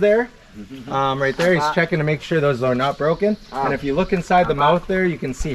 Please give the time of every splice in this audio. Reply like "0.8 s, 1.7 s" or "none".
none